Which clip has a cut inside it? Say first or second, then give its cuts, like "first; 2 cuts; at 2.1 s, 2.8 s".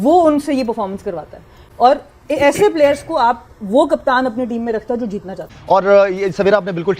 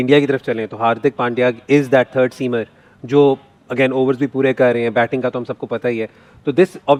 first; 1 cut; at 5.6 s